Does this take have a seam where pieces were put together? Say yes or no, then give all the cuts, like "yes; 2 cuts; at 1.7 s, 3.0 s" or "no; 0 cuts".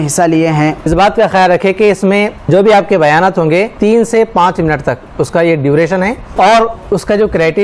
yes; 4 cuts; at 0.8 s, 2.5 s, 3.7 s, 6.2 s